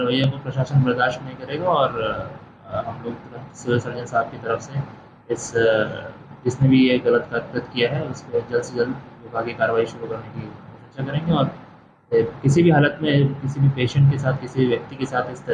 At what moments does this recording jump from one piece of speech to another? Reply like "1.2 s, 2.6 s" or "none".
none